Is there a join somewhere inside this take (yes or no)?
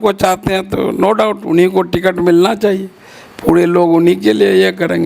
no